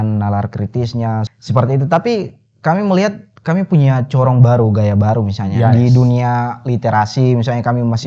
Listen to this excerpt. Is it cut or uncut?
cut